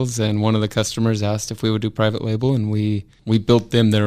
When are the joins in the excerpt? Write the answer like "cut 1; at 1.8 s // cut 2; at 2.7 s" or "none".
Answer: cut 1; at 3.1 s